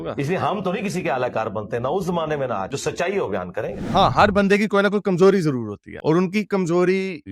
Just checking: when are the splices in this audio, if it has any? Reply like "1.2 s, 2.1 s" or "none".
3.8 s